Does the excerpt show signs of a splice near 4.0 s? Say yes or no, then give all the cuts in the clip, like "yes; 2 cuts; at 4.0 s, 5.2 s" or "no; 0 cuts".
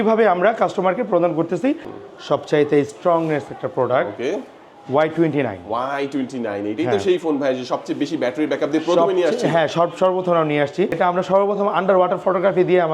no; 2 cuts; at 1.9 s, 11.0 s